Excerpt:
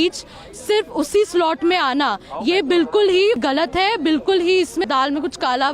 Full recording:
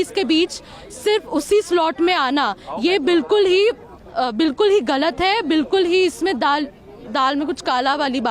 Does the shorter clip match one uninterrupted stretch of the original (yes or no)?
no